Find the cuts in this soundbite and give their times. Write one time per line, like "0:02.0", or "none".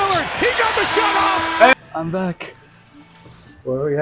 0:01.7

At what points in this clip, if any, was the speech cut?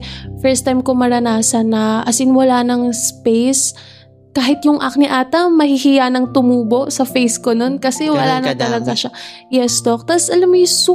none

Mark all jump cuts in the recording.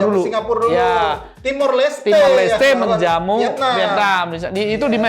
none

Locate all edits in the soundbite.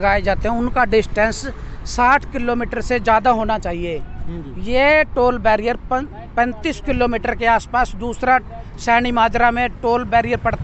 none

